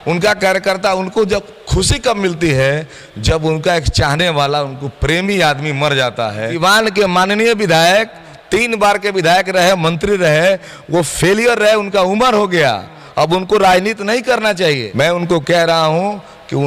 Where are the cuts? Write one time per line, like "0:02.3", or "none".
0:06.5
0:14.9